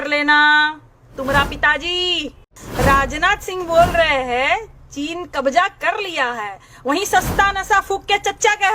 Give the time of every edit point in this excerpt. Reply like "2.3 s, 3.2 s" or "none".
2.6 s